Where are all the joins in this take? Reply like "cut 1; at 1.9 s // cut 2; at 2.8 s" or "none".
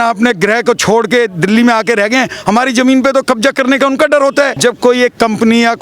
cut 1; at 4.5 s